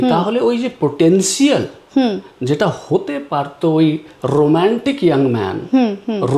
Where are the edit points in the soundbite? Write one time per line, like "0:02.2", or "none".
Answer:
none

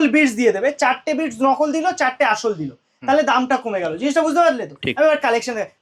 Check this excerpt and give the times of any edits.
none

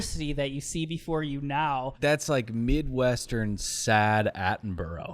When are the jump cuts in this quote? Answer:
0:01.9

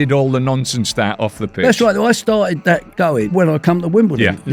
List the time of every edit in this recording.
0:03.3

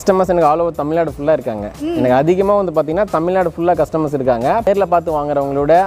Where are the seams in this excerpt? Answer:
0:04.7

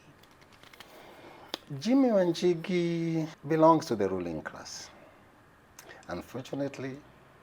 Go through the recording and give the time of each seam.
0:03.4

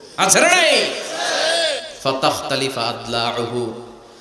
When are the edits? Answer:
0:01.9

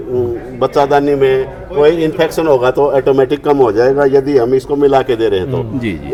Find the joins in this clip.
none

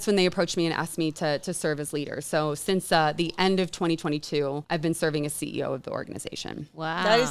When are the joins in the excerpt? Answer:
0:04.6

